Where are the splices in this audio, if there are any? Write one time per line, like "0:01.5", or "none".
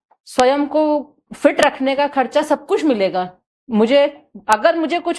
none